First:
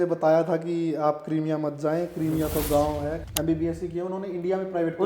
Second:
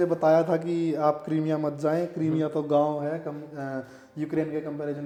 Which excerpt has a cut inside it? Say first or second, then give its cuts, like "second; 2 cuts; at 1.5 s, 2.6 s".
first; 1 cut; at 3.2 s